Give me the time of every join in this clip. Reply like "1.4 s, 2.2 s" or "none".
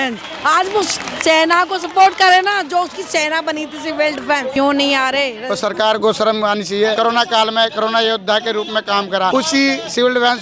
4.5 s, 5.4 s, 6.9 s, 9.3 s

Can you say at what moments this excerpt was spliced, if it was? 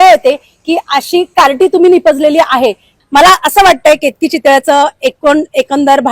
2.9 s

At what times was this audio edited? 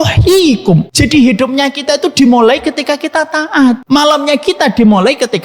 0.9 s, 3.8 s

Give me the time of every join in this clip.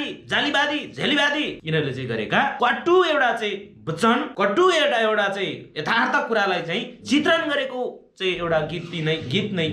1.6 s, 2.5 s, 4.3 s

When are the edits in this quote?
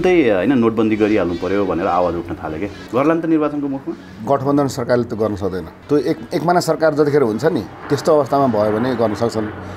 2.8 s, 4.1 s, 5.7 s, 7.7 s

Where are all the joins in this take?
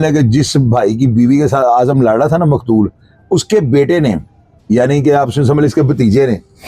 none

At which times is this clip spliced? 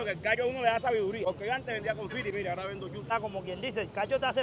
1.2 s, 3.1 s

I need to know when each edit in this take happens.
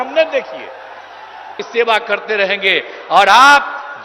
1.6 s

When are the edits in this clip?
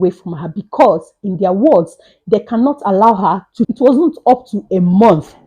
3.7 s

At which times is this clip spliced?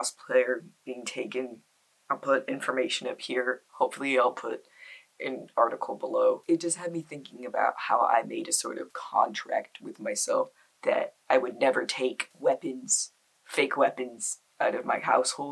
none

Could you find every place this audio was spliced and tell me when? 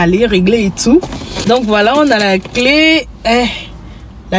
none

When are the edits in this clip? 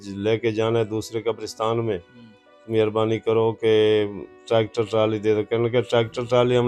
none

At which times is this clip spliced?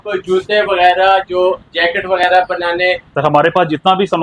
3.0 s

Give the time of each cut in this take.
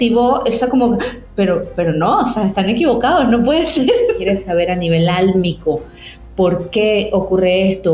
4.2 s

